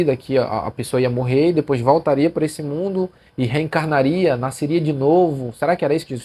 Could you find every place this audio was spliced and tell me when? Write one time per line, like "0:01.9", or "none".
none